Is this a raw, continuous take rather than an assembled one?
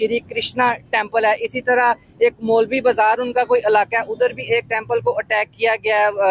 yes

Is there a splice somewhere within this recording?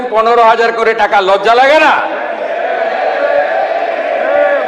no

